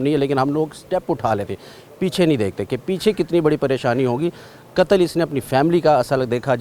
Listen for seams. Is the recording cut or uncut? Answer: uncut